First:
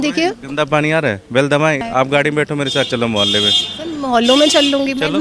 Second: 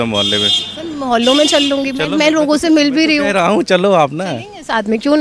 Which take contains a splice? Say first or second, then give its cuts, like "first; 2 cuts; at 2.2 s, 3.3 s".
first; 1 cut; at 1.8 s